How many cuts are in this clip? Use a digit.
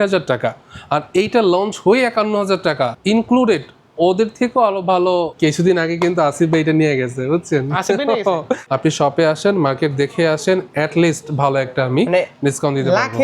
3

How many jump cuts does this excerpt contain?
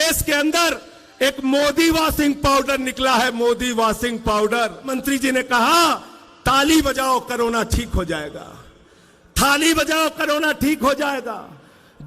1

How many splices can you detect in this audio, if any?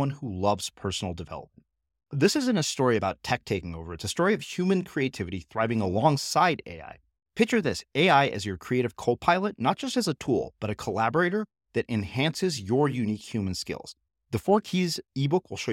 0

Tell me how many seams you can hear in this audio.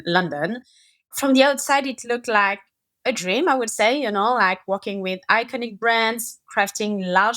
1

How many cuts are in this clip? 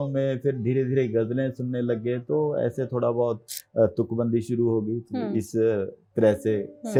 0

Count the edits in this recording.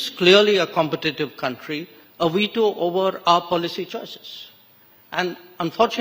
0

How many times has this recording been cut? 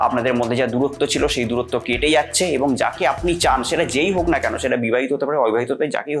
0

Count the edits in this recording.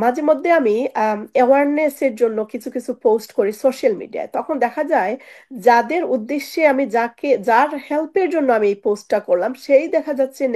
0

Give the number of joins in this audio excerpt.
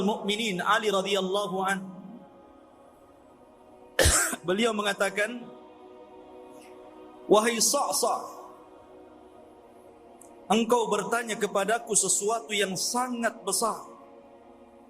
6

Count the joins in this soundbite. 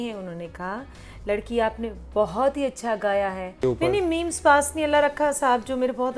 1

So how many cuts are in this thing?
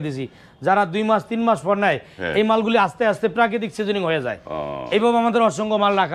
0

